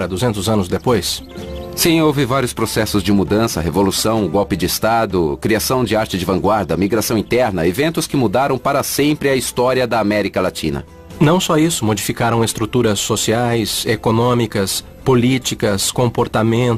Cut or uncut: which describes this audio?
uncut